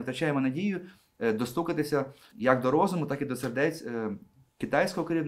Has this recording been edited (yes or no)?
yes